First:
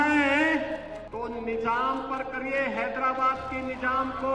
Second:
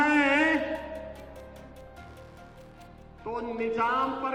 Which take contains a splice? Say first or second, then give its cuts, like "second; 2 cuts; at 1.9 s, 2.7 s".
first; 1 cut; at 1.0 s